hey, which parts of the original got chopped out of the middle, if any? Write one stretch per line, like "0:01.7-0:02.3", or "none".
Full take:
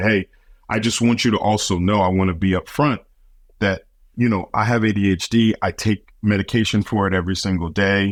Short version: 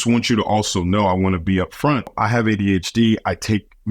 0:03.1-0:04.5